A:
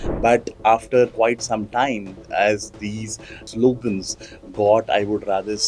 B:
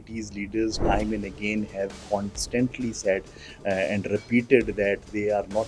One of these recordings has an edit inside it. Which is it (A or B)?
A